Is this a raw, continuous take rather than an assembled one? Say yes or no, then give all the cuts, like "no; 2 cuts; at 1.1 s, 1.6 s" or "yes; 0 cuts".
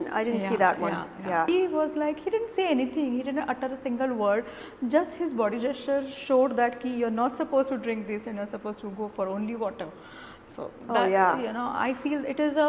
no; 1 cut; at 1.5 s